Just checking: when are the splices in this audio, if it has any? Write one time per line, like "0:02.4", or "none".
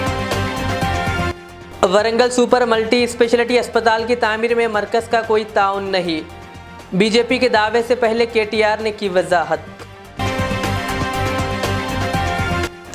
0:01.3

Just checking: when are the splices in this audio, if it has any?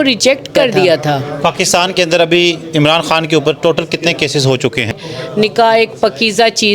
0:01.3
0:05.1

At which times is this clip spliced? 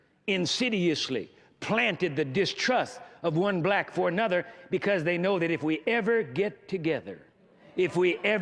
none

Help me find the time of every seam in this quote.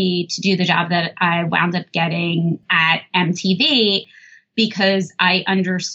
0:04.0

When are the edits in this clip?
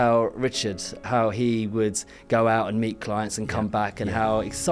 0:01.0

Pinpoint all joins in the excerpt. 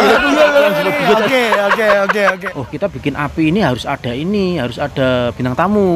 0:02.4

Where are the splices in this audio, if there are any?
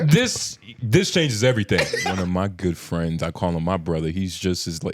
0:02.1

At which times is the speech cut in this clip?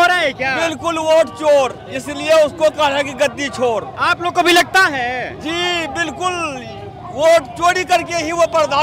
none

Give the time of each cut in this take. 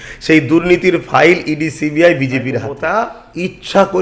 0:02.8

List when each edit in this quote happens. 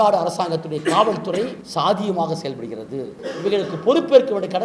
0:01.6
0:03.2

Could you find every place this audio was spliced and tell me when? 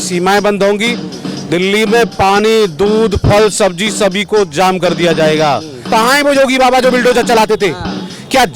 0:05.7

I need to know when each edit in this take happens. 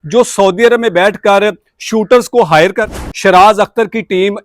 0:02.9

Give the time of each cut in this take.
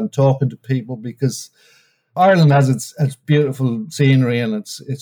0:02.2
0:03.2

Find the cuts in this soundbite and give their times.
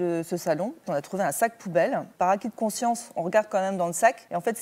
0:00.9
0:02.1

